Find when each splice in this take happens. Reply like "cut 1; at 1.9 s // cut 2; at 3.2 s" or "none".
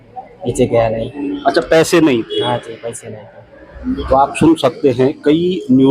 none